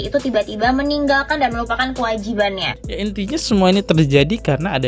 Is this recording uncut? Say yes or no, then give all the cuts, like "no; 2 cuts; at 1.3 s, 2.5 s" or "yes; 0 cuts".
no; 1 cut; at 2.7 s